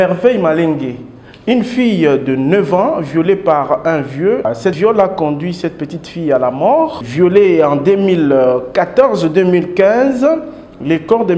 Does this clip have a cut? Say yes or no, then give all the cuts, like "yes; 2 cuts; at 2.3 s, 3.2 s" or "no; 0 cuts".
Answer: yes; 2 cuts; at 4.8 s, 7.0 s